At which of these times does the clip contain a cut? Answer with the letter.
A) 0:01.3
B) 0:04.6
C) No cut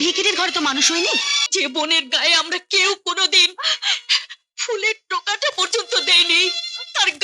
A